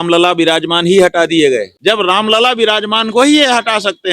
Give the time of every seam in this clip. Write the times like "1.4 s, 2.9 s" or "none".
1.7 s